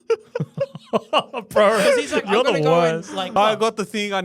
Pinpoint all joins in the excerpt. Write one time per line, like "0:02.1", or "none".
0:03.3